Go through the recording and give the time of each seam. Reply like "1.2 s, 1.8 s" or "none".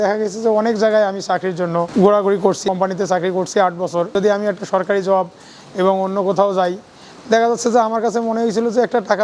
1.9 s, 2.7 s, 4.1 s